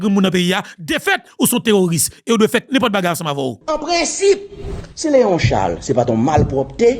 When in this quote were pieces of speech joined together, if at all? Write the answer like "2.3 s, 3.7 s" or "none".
3.6 s